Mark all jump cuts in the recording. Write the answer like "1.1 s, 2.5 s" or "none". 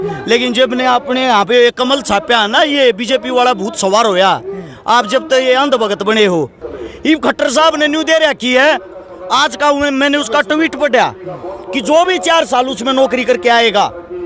6.6 s